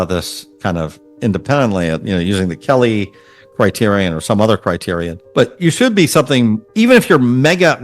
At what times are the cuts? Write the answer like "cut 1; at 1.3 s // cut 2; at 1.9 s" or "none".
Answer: cut 1; at 5.2 s // cut 2; at 6.6 s